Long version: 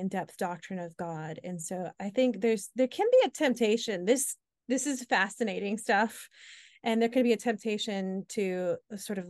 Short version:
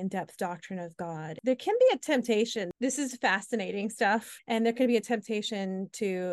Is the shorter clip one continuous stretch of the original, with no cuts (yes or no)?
no